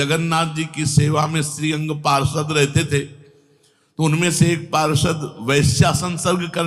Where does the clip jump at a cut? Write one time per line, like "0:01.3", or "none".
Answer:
none